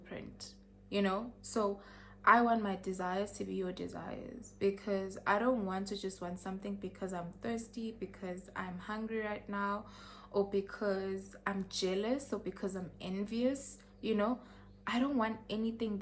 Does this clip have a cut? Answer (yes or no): no